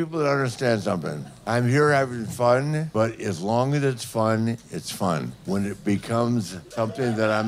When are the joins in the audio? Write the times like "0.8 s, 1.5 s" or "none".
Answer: 1.3 s, 2.9 s, 5.3 s, 6.6 s

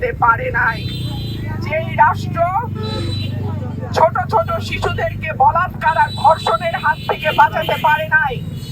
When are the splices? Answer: none

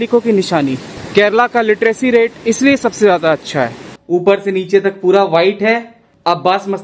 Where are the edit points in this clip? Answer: 3.9 s

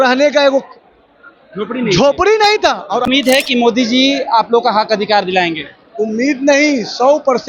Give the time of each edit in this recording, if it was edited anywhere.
3.0 s

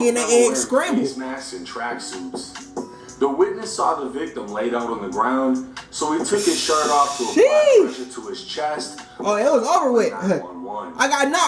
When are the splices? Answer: none

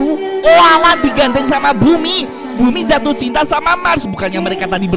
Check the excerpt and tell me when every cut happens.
none

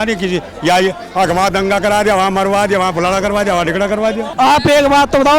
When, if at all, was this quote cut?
4.3 s

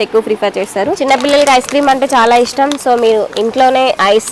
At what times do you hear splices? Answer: 1.0 s

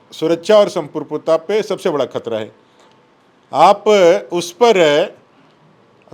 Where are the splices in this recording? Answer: none

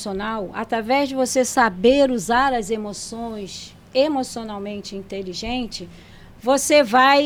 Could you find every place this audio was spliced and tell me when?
none

